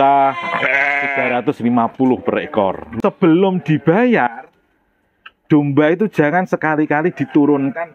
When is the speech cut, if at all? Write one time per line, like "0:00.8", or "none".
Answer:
0:03.0